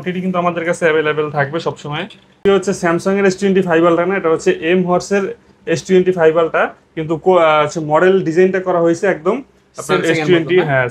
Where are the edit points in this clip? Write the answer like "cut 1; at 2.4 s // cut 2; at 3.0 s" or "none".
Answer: cut 1; at 2.4 s